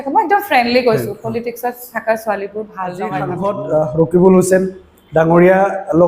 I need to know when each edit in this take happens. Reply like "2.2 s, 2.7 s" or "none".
3.3 s